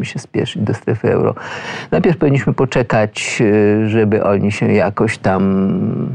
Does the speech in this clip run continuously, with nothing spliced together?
yes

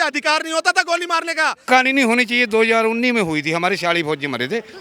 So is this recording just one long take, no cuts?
no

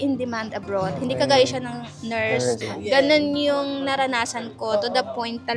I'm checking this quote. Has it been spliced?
yes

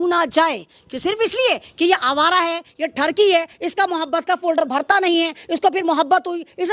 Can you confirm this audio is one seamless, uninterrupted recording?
yes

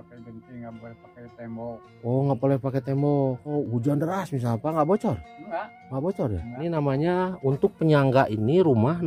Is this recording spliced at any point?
yes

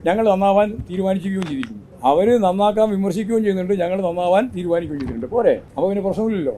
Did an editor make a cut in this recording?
yes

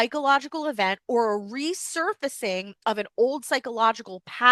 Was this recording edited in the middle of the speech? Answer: no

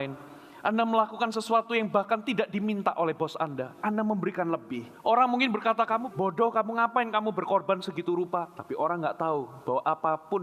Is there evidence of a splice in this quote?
yes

